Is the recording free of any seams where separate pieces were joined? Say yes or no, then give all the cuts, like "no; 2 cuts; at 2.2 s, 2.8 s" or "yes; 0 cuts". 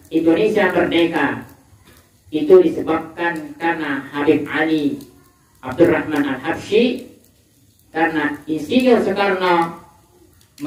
yes; 0 cuts